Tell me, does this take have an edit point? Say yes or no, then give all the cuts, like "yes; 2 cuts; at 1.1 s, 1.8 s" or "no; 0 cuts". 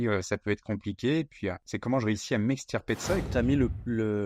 yes; 2 cuts; at 1.7 s, 3.2 s